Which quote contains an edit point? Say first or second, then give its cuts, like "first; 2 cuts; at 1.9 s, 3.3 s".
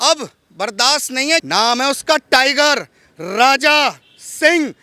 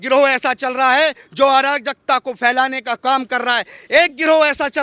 first; 1 cut; at 1.4 s